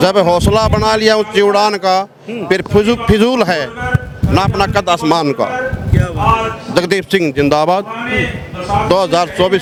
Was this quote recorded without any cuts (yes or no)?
yes